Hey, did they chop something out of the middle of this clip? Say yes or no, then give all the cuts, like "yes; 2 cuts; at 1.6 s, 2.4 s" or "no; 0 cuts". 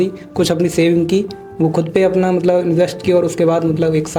no; 0 cuts